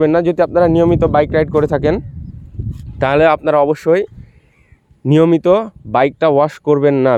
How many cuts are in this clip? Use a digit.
0